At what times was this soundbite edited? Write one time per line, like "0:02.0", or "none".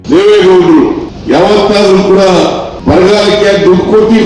0:01.1
0:02.7